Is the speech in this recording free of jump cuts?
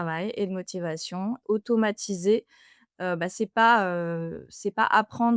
no; 1 cut; at 1.4 s

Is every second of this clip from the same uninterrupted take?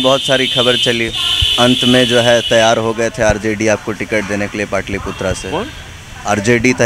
yes; 0 cuts

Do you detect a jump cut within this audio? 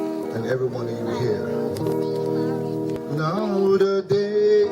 yes; 1 cut; at 3.0 s

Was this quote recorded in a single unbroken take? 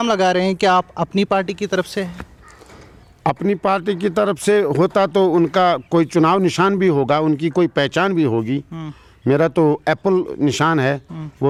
yes; 0 cuts

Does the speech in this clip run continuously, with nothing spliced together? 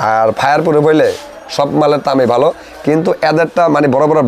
yes; 0 cuts

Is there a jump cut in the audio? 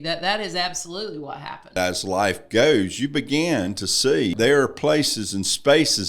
yes; 2 cuts; at 1.7 s, 4.3 s

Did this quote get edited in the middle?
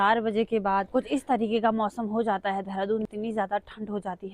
yes; 2 cuts; at 0.9 s, 3.1 s

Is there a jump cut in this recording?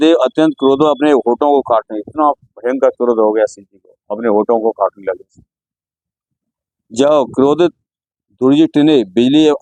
no; 0 cuts

